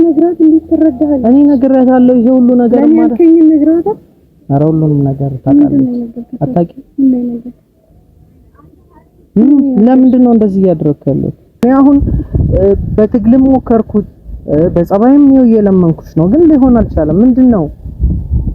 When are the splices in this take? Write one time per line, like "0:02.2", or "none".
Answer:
0:11.6